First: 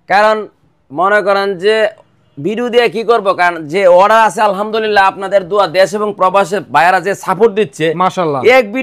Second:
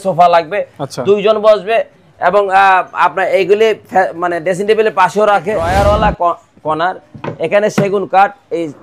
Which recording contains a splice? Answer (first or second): second